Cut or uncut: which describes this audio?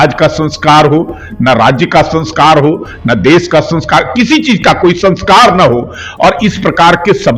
uncut